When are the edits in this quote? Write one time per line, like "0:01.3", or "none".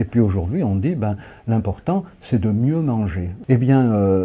0:03.3